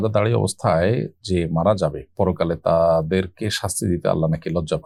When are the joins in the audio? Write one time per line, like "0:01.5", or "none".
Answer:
none

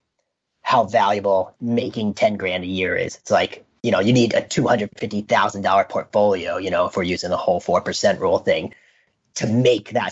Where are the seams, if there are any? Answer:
0:01.6

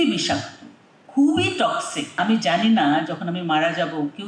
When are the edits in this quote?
0:02.2

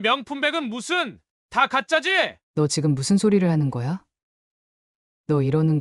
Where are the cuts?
0:02.4

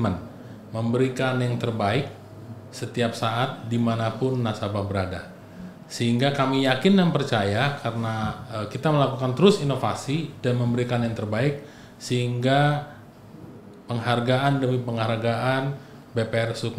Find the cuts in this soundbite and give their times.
none

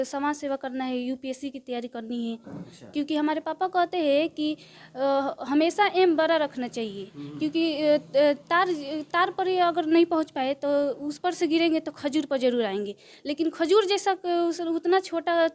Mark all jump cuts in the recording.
none

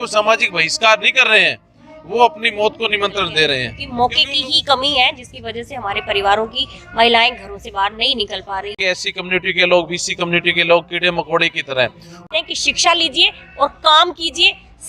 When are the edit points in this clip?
0:03.8
0:08.8
0:12.4

